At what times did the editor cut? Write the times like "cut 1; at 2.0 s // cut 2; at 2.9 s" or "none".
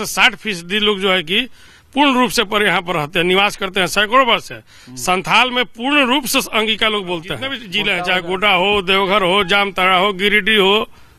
cut 1; at 7.7 s